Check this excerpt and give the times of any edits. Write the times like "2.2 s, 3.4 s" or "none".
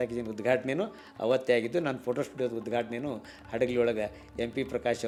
none